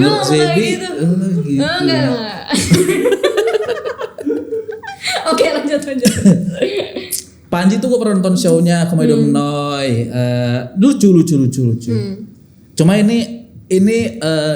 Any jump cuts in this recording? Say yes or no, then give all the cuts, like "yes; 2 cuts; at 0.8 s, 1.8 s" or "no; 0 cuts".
no; 0 cuts